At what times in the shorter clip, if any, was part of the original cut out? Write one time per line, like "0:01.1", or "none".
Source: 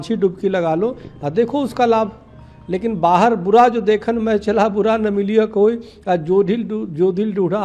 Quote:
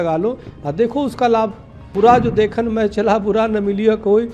0:01.9